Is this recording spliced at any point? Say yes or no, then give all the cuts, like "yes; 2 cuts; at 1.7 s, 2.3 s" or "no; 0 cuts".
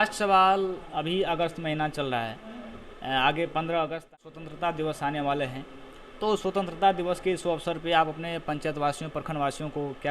yes; 1 cut; at 4.0 s